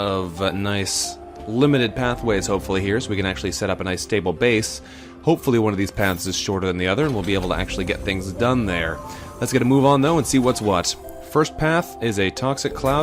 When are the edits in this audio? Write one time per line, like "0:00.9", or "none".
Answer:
0:07.6

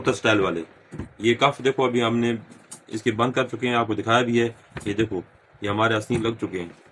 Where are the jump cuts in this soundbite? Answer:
none

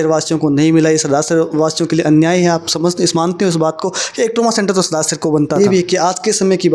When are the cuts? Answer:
0:05.6

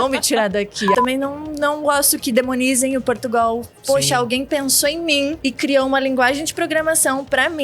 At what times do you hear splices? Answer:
0:00.9
0:05.4

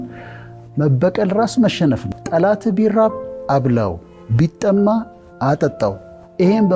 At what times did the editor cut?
0:02.1

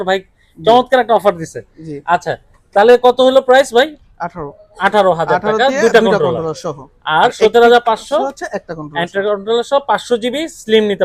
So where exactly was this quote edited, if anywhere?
none

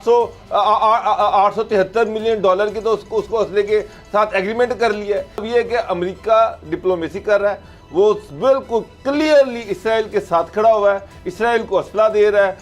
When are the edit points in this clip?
0:05.4

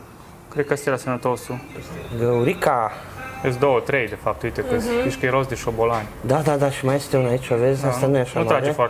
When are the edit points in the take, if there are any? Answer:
0:01.7

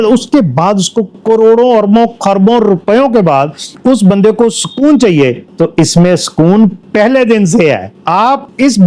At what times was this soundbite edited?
none

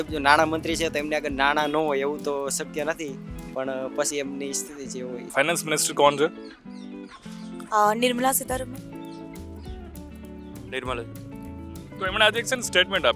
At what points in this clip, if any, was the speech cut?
none

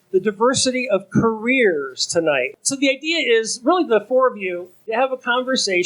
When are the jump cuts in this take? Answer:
0:02.6
0:04.9

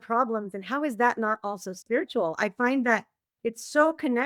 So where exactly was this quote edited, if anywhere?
none

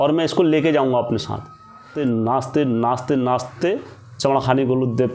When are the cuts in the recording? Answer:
0:01.9

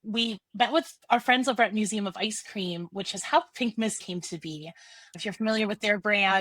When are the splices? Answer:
0:01.0
0:04.0

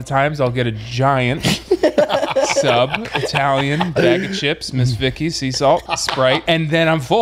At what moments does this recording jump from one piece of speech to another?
0:06.2

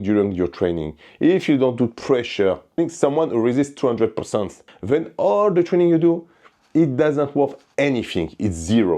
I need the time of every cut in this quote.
0:02.8

